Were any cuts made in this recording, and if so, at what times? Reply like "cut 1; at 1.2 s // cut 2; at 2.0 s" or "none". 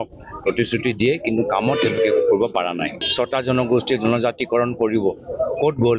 cut 1; at 3.1 s